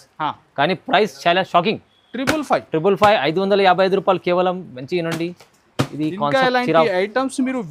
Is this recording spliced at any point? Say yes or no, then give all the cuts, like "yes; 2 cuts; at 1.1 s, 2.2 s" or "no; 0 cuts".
no; 0 cuts